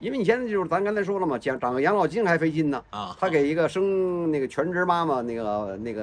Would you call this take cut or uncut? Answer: uncut